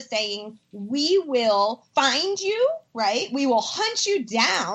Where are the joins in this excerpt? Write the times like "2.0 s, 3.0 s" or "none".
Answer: 1.9 s